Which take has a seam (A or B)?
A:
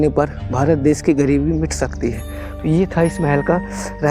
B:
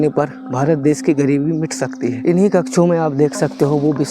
B